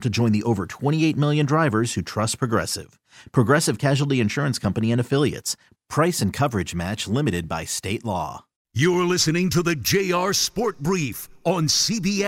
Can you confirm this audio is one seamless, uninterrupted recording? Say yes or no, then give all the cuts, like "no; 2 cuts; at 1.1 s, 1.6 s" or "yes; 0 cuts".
no; 1 cut; at 8.6 s